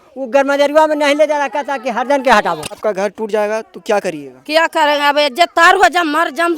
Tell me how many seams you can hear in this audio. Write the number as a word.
one